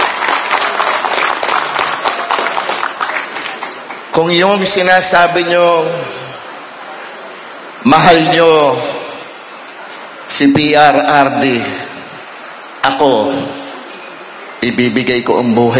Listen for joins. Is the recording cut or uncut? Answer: uncut